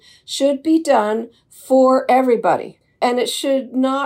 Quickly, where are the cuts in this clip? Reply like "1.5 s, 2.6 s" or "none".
2.8 s